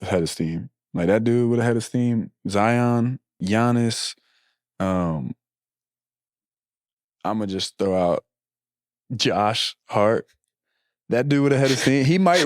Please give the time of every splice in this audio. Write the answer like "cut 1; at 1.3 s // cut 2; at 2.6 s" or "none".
cut 1; at 3.4 s